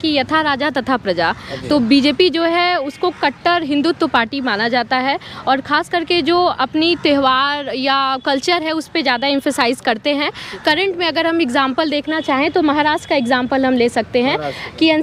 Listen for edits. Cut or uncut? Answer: uncut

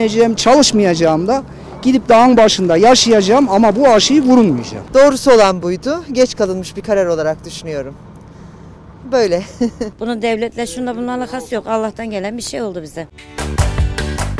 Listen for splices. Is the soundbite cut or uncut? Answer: cut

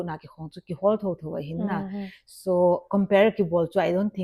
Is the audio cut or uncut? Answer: uncut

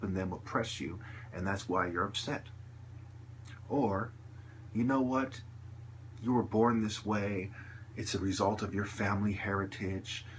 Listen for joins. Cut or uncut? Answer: uncut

